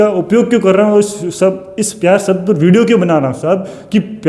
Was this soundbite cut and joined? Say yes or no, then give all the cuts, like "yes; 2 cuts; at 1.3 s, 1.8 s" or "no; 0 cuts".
no; 0 cuts